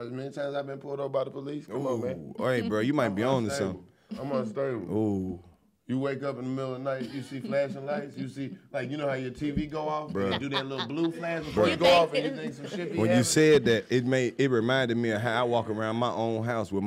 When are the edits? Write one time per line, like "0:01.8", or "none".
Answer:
none